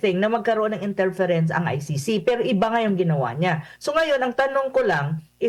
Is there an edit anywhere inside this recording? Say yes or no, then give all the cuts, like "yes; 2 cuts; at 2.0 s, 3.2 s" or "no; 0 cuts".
no; 0 cuts